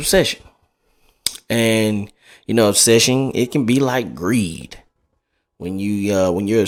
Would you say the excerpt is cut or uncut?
uncut